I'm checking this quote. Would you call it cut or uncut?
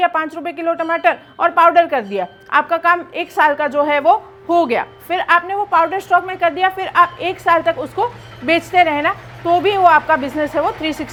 uncut